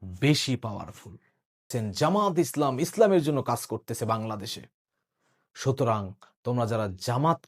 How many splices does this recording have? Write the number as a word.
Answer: one